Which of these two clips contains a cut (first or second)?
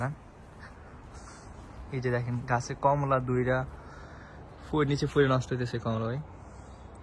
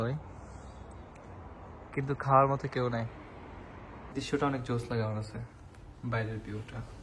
second